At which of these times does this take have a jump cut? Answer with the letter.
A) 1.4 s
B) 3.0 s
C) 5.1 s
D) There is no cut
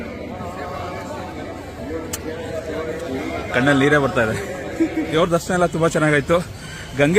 C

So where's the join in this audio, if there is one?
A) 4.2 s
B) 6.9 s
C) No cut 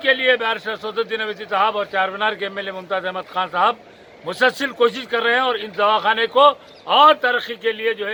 C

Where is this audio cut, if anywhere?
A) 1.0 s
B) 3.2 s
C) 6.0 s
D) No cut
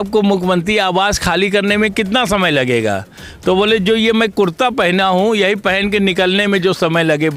D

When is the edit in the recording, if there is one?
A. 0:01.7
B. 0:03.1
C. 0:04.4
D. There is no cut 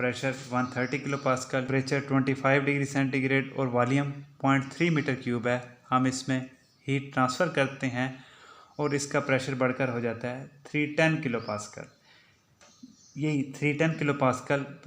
A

